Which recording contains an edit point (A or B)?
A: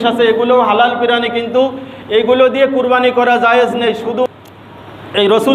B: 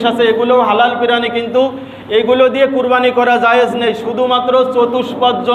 A